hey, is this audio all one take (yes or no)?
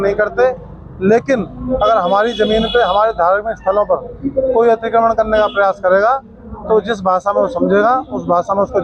yes